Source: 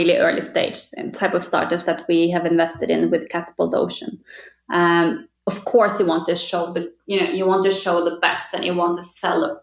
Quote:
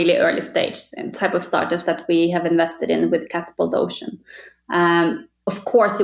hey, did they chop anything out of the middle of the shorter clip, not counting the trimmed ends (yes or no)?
no